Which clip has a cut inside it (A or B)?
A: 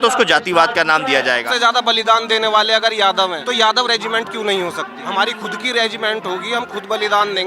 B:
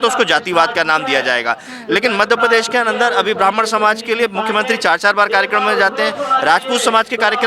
A